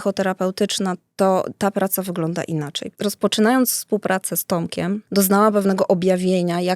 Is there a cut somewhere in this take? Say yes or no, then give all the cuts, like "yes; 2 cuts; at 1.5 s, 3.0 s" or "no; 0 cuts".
yes; 2 cuts; at 2.8 s, 5.0 s